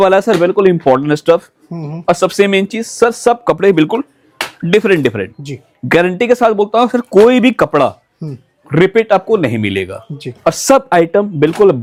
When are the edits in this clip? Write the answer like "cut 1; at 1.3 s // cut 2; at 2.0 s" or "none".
none